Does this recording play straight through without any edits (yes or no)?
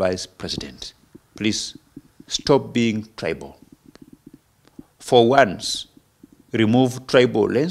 yes